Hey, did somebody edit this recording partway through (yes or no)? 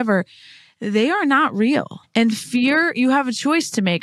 yes